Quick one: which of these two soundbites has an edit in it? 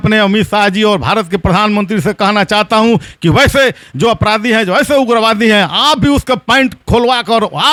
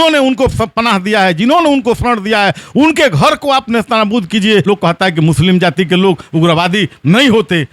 second; 1 cut; at 4.6 s

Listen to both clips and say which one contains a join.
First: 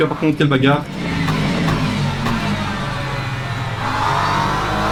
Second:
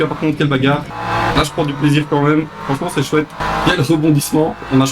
second; 2 cuts; at 0.9 s, 3.4 s

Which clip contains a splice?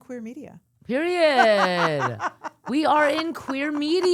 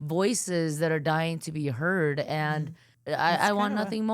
second; 1 cut; at 2.9 s

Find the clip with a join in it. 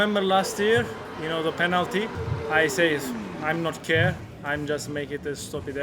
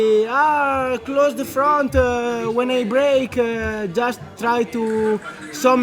first; 1 cut; at 2.5 s

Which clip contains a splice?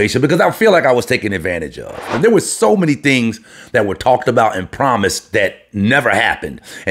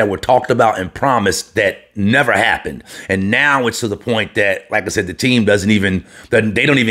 first; 1 cut; at 2.1 s

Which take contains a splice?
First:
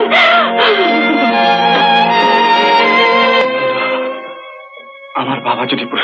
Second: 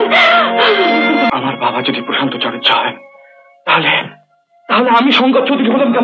second; 1 cut; at 1.3 s

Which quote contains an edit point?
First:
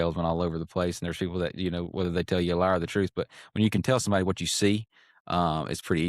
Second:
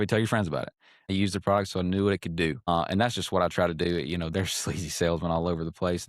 second; 2 cuts; at 1.1 s, 2.7 s

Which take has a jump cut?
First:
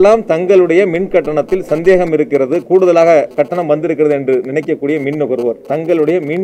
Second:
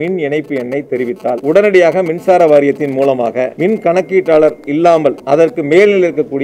second; 3 cuts; at 1.4 s, 3.5 s, 5.2 s

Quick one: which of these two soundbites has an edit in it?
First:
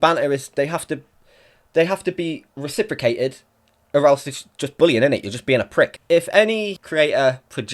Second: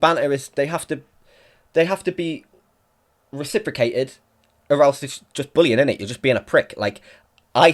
first; 3 cuts; at 2.5 s, 6.0 s, 6.8 s

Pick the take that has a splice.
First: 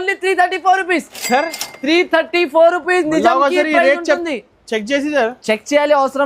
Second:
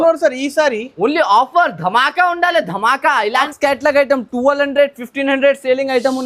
second; 1 cut; at 3.5 s

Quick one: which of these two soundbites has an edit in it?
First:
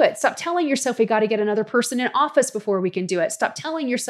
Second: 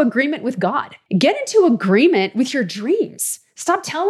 second; 1 cut; at 0.9 s

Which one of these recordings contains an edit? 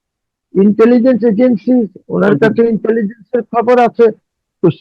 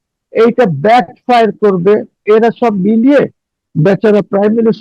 second; 1 cut; at 2.2 s

